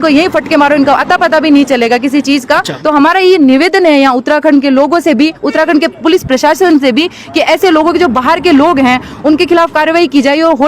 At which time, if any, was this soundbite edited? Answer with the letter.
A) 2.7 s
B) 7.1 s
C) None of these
A